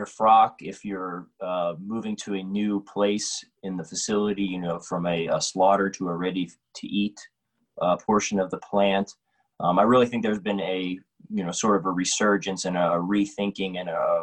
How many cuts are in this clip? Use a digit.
0